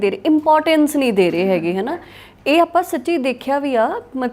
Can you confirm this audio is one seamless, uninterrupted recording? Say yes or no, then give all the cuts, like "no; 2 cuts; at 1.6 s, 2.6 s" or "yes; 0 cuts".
yes; 0 cuts